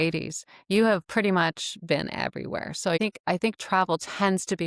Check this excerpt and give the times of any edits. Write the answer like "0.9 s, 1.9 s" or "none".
3.0 s